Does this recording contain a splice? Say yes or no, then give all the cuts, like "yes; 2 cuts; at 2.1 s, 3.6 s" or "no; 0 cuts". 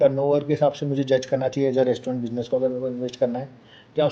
no; 0 cuts